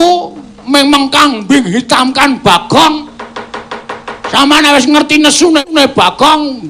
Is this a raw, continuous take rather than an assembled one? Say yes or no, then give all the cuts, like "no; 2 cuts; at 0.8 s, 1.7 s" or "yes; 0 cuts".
yes; 0 cuts